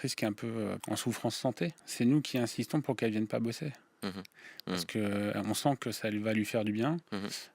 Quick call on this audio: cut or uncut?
cut